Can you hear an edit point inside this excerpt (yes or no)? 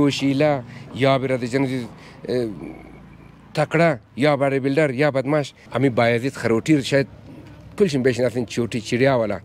yes